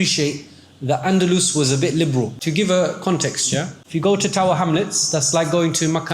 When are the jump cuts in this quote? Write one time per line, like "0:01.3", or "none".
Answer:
0:02.4
0:03.8